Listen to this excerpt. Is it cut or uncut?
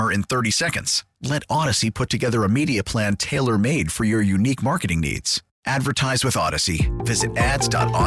uncut